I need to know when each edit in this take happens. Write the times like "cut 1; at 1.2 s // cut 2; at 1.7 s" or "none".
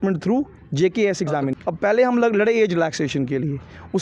cut 1; at 1.5 s